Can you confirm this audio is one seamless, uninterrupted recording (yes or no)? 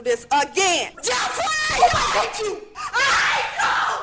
no